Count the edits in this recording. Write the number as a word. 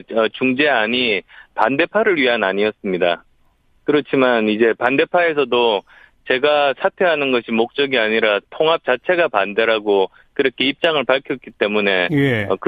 zero